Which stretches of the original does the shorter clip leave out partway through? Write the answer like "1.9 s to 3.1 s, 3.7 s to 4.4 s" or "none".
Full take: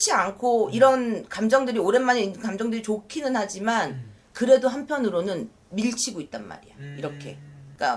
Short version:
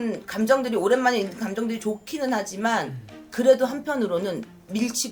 none